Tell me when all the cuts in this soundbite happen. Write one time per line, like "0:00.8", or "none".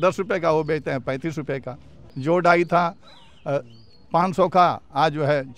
0:02.2